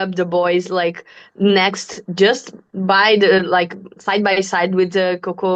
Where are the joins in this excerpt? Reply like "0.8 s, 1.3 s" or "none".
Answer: none